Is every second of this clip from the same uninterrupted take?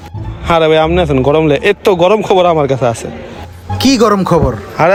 yes; 0 cuts

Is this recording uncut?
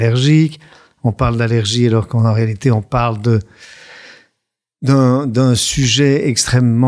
yes; 0 cuts

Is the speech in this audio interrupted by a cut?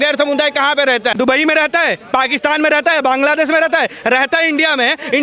yes; 1 cut; at 1.1 s

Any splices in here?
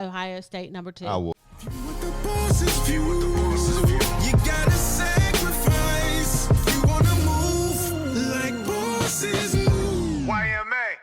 yes; 1 cut; at 1.4 s

